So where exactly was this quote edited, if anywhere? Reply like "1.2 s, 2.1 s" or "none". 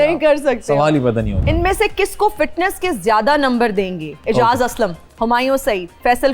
1.4 s, 4.1 s, 5.0 s